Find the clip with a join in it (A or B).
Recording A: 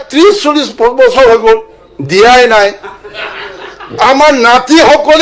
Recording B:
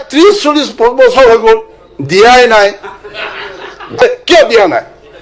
B